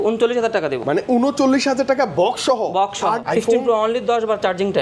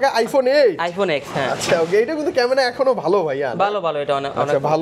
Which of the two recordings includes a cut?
first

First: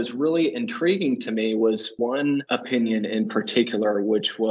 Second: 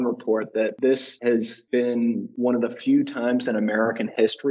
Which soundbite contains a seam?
second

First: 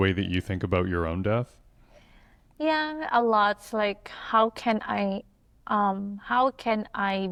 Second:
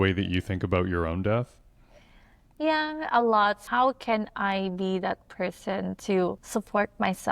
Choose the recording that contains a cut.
second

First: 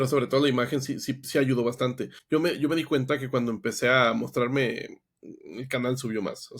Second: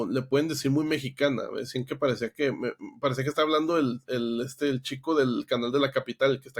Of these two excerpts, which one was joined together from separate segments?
first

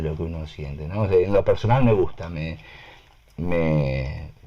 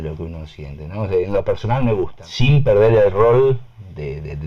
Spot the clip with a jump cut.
second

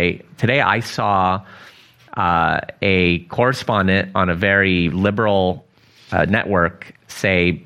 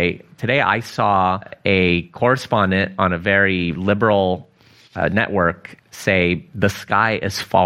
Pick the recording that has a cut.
second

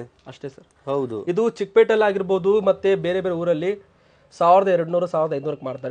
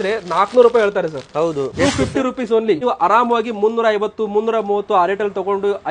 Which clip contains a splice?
second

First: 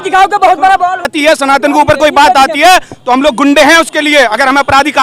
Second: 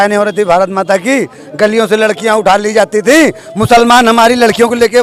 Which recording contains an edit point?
first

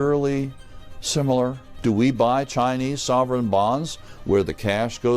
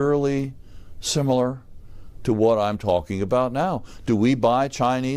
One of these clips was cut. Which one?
first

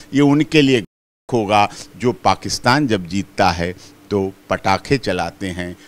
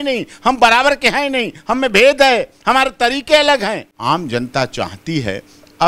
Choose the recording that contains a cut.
second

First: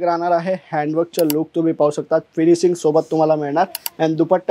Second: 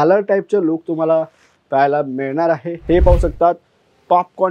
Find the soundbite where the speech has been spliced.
second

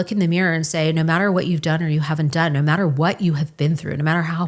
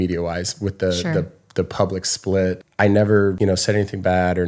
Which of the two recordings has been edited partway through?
second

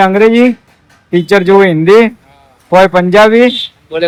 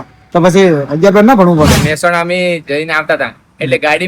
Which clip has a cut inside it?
second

